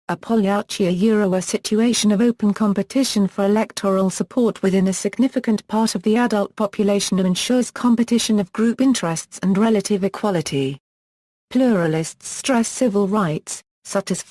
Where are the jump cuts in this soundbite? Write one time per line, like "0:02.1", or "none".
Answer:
0:03.3